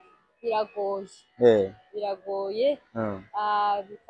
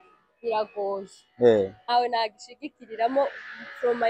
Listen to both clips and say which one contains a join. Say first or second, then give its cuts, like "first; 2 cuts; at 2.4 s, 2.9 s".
second; 1 cut; at 1.9 s